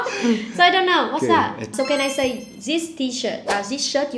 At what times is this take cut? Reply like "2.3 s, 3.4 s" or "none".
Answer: 1.7 s